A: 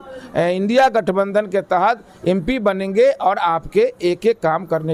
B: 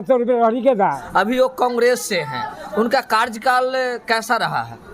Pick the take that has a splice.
B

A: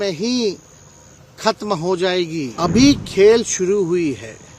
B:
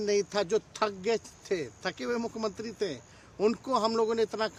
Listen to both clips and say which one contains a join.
A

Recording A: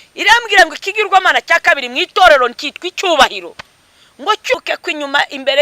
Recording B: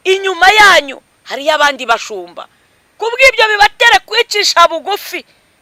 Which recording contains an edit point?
A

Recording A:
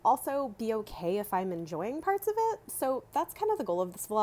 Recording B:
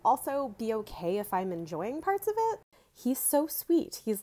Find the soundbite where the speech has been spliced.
B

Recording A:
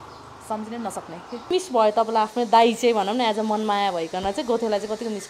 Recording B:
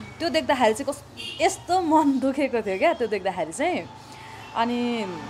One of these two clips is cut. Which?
A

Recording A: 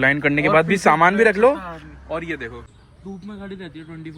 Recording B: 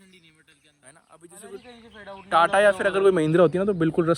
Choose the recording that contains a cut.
A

